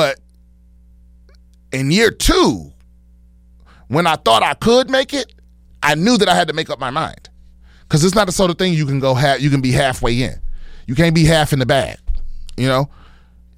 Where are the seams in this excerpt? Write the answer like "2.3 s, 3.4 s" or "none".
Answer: none